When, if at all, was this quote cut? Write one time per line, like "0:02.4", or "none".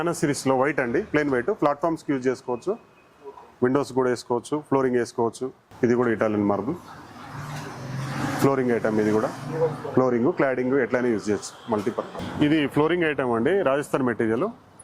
0:05.6
0:12.1